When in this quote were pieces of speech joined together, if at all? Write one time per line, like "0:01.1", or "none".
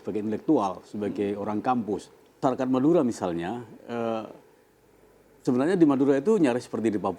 0:02.2